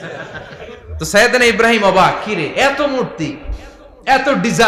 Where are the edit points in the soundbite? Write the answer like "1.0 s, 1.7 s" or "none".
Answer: none